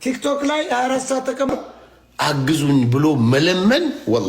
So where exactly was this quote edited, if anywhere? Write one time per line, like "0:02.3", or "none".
0:01.5